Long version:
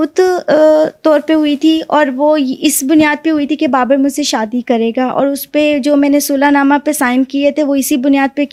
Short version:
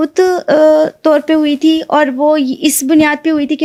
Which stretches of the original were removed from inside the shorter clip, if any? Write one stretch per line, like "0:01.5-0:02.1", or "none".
none